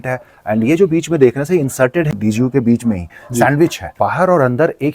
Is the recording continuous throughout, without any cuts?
no; 2 cuts; at 2.1 s, 3.9 s

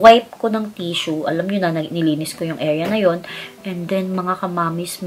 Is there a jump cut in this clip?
no; 0 cuts

